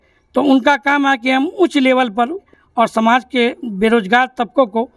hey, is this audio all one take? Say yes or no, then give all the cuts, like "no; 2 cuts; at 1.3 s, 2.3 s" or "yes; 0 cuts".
no; 1 cut; at 2.5 s